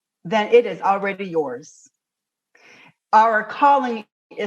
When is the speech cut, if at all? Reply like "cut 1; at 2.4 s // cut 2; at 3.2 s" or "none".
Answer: cut 1; at 2.9 s